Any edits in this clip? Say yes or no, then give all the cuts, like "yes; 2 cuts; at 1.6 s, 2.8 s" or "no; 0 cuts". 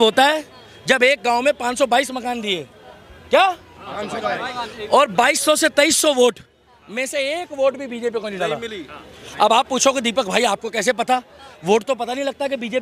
no; 0 cuts